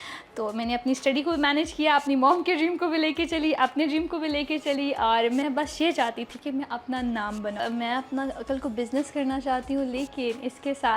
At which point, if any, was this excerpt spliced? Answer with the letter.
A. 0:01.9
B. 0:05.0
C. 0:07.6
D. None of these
C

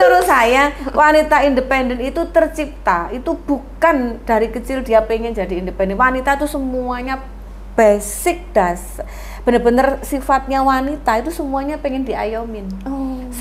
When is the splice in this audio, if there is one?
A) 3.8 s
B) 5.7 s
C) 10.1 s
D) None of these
D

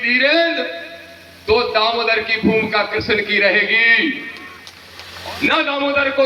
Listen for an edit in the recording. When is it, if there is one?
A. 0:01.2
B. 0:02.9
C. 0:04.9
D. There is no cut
C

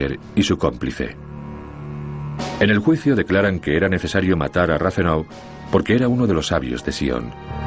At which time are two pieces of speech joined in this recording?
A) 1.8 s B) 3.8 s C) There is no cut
A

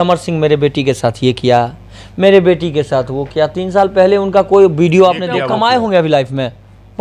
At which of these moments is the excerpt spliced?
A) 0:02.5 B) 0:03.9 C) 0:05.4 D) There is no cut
C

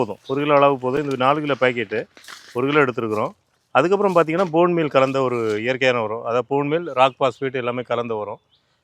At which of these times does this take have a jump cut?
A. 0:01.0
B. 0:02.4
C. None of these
C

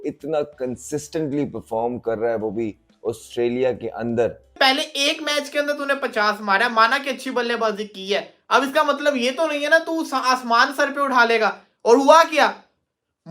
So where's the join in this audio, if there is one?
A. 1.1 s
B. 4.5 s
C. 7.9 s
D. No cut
B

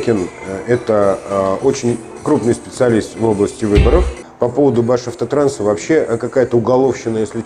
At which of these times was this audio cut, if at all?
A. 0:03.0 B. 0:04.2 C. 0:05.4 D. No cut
B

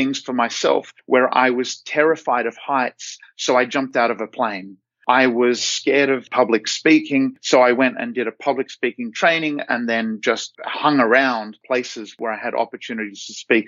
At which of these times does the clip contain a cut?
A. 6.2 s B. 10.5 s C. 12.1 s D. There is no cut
D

